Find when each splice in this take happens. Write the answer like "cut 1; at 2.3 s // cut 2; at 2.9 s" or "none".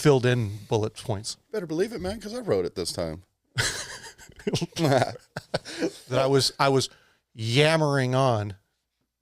cut 1; at 6.0 s